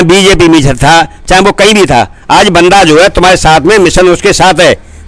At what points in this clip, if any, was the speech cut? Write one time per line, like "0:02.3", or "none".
none

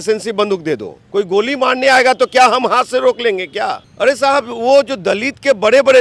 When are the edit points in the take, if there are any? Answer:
0:01.0
0:03.8

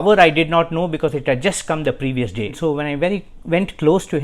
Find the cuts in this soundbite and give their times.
0:02.6

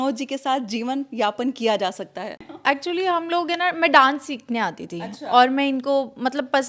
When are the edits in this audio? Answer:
0:02.5

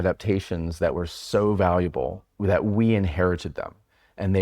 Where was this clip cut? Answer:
0:02.2

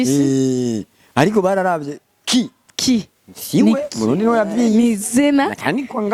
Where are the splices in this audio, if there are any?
none

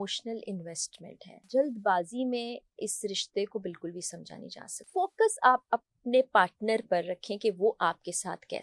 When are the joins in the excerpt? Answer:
0:01.5
0:04.8

